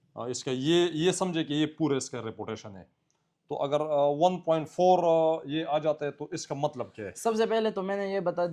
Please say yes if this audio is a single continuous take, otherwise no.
yes